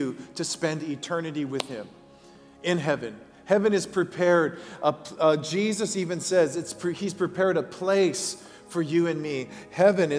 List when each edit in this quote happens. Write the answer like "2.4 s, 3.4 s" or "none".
none